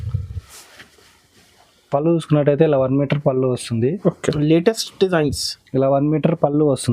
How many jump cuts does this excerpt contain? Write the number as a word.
one